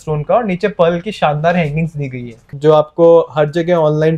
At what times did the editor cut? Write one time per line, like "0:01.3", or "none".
0:02.5